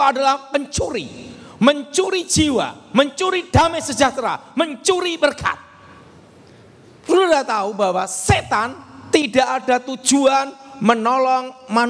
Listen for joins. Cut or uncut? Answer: uncut